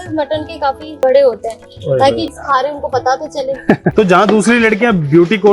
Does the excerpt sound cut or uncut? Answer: cut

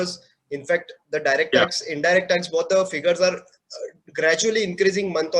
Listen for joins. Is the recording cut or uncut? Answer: uncut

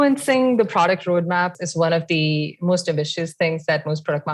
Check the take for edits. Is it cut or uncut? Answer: uncut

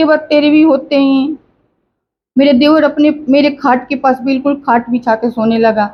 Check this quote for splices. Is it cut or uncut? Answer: uncut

